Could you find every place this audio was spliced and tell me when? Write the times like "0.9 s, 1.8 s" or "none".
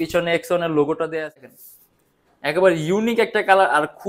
1.6 s

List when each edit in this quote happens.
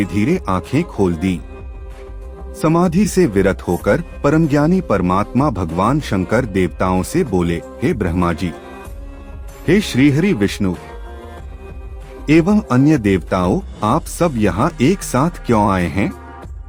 none

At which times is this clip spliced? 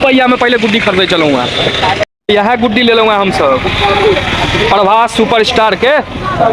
2.1 s

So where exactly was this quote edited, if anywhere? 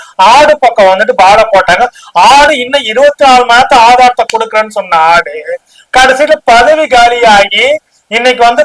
none

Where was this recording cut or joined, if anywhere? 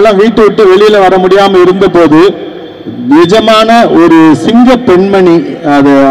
none

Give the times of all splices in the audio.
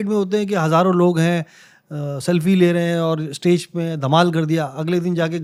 none

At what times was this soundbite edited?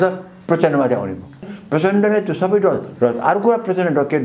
1.5 s

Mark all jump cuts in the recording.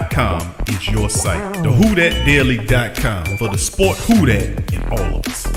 none

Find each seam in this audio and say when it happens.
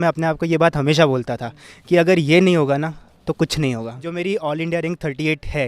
4.0 s

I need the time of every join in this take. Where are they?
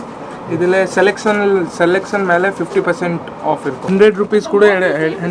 3.9 s

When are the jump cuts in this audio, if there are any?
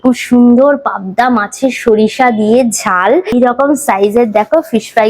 3.3 s

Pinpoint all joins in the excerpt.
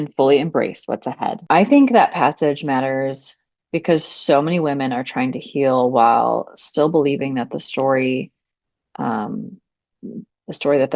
1.4 s

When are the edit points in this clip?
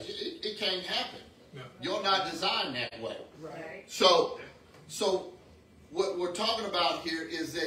2.9 s

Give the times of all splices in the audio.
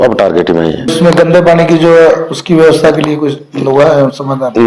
0.9 s

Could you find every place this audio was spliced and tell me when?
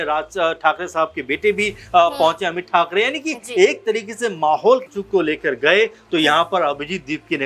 4.9 s

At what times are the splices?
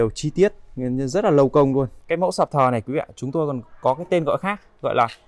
2.0 s

